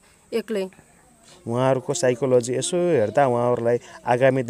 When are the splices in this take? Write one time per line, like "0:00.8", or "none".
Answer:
0:01.3